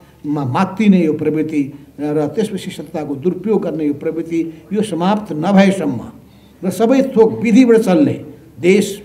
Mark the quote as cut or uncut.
uncut